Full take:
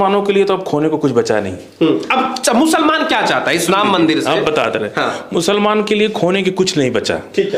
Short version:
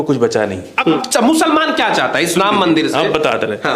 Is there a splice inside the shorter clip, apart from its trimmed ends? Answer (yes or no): yes